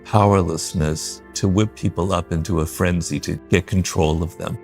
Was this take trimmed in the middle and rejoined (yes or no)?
yes